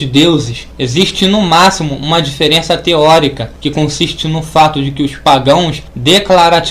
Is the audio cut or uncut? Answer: cut